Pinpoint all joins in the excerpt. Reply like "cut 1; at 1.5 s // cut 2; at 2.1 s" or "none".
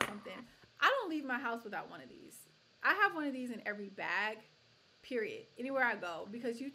none

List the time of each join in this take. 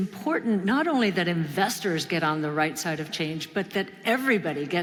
none

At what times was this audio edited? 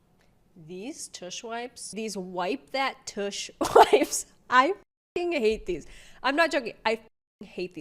cut 1; at 1.9 s

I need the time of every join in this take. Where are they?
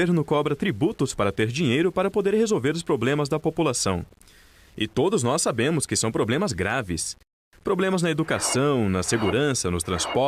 cut 1; at 2.8 s

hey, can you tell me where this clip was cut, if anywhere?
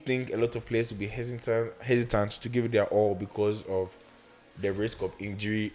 none

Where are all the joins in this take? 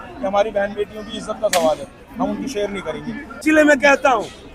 cut 1; at 3.4 s

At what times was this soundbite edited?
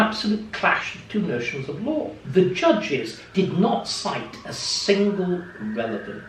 cut 1; at 2.2 s

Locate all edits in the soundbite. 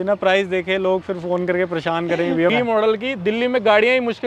cut 1; at 2.5 s

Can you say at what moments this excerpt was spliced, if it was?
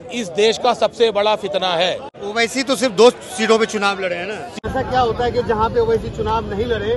cut 1; at 2.1 s // cut 2; at 4.6 s

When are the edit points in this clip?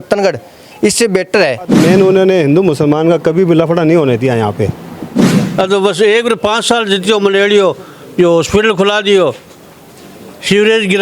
cut 1; at 1.7 s // cut 2; at 5.2 s

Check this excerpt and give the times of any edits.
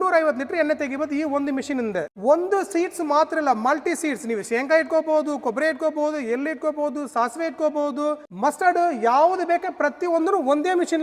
cut 1; at 2.1 s // cut 2; at 8.3 s

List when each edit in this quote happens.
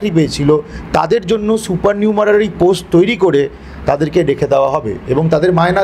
none

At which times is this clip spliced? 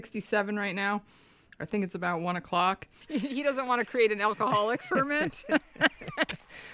cut 1; at 2.9 s

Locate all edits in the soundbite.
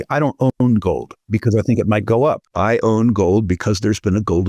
cut 1; at 1.1 s // cut 2; at 2.5 s

